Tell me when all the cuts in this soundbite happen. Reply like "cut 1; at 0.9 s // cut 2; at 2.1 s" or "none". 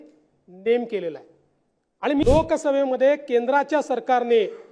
cut 1; at 2.2 s

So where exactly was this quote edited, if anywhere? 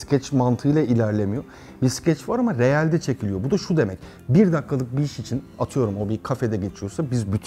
none

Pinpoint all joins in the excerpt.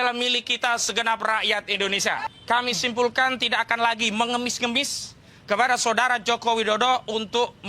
cut 1; at 2.3 s

